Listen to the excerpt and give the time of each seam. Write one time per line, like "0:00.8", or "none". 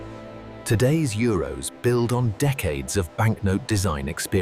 none

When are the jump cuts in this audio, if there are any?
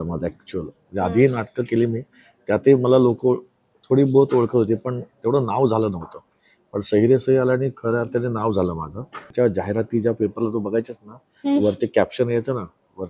0:09.3

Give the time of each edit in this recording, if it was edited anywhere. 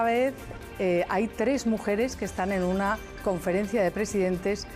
0:01.1

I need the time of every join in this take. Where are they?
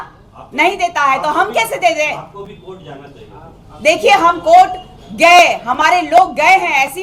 none

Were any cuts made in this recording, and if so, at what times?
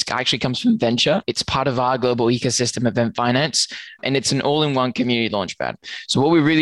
0:01.3
0:04.0

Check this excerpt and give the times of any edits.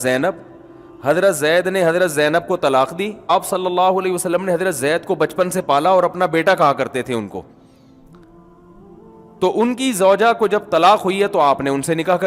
0:03.3

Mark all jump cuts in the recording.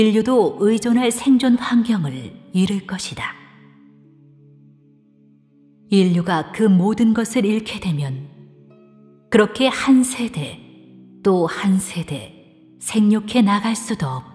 0:06.5

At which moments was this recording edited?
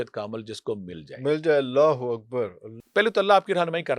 0:02.7

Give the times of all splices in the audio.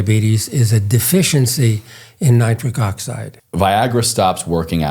0:03.4

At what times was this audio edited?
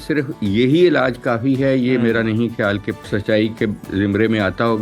0:03.0
0:03.9

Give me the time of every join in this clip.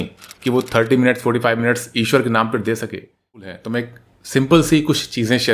0:03.6

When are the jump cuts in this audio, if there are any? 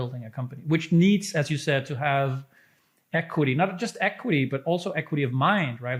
none

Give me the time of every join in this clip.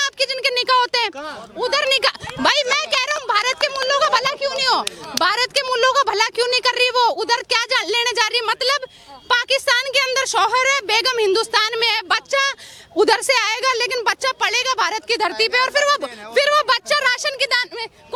none

